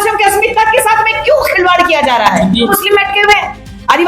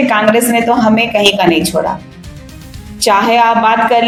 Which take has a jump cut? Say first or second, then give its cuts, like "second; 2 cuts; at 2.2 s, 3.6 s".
first; 1 cut; at 2.7 s